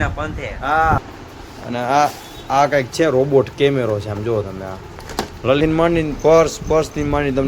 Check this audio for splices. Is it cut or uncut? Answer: cut